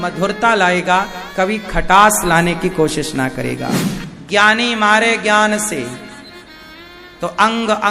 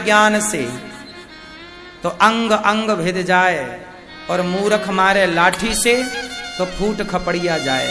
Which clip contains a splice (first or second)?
first